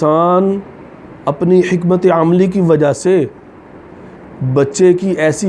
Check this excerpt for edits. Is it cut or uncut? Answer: uncut